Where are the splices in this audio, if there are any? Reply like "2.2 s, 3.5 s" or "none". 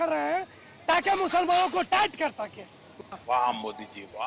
none